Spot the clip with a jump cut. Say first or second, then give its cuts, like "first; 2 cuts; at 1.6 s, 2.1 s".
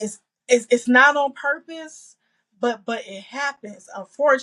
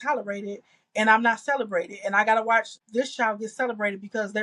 second; 1 cut; at 2.8 s